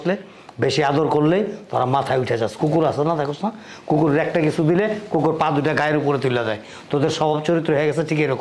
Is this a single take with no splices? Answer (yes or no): yes